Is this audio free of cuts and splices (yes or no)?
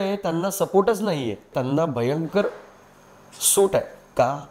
no